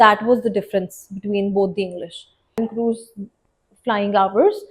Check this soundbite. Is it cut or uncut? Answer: cut